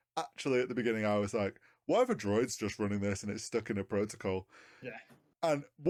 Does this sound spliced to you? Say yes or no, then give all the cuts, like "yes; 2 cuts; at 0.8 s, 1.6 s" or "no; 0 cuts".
no; 0 cuts